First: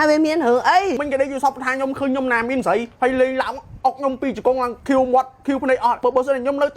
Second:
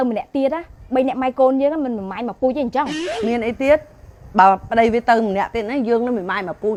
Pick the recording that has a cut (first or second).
first